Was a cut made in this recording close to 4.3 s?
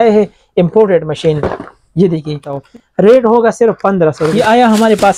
yes; 2 cuts; at 2.6 s, 4.3 s

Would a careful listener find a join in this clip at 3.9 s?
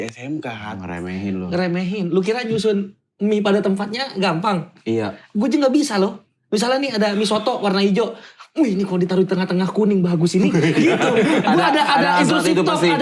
no; 0 cuts

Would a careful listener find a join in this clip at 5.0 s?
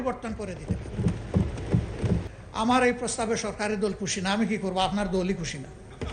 no; 1 cut; at 2.3 s

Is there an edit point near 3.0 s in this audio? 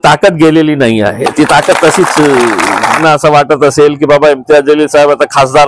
yes; 1 cut; at 3.0 s

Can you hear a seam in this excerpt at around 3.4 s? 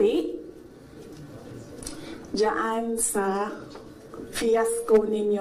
no; 0 cuts

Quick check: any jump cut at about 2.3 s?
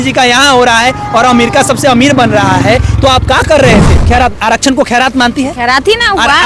no; 1 cut; at 4.0 s

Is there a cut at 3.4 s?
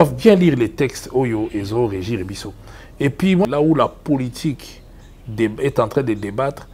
yes; 1 cut; at 3.4 s

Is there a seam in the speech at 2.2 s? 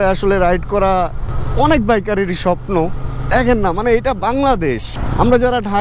no; 0 cuts

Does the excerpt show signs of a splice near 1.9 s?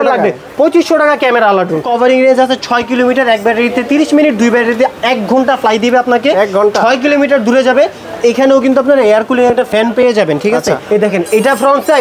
yes; 2 cuts; at 1.9 s, 10.8 s

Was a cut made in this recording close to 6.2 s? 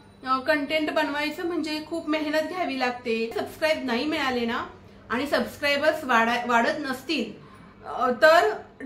no; 1 cut; at 3.3 s

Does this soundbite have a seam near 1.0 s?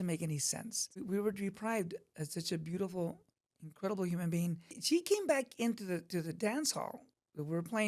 yes; 2 cuts; at 1.0 s, 4.7 s

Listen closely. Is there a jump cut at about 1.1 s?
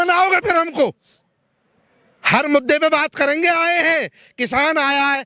no; 0 cuts

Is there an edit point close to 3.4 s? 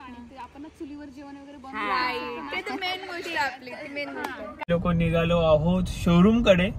no; 1 cut; at 4.6 s

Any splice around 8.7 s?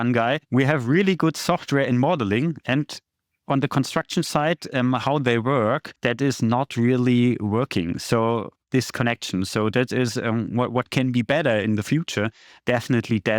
no; 1 cut; at 5.9 s

